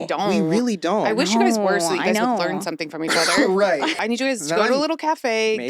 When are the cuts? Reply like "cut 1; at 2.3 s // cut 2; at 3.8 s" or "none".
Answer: cut 1; at 4.0 s